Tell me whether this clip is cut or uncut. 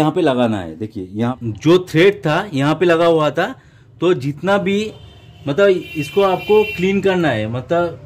cut